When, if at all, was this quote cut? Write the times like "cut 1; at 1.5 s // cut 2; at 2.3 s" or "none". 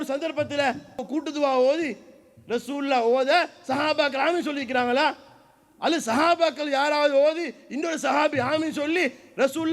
cut 1; at 1.1 s